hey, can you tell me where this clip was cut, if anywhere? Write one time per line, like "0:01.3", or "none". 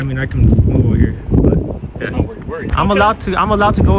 0:02.7